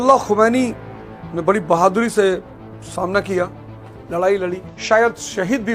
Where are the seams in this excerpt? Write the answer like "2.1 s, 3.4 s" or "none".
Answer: 4.7 s